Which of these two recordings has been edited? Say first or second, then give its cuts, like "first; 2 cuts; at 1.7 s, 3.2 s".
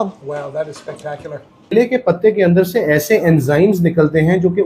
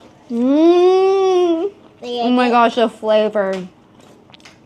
first; 1 cut; at 1.7 s